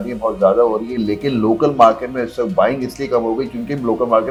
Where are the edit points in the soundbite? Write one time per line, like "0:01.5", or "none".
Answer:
none